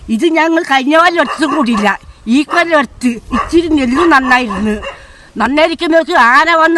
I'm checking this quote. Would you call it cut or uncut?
uncut